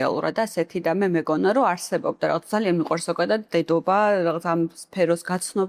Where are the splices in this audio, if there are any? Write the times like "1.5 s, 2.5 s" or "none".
none